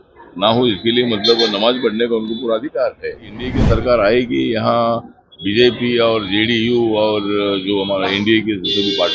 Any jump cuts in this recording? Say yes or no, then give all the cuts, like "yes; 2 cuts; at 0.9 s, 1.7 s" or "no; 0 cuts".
yes; 1 cut; at 3.6 s